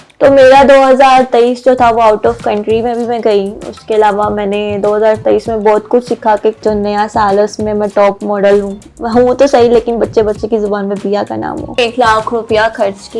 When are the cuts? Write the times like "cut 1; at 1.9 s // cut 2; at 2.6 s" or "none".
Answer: cut 1; at 6.6 s // cut 2; at 11.8 s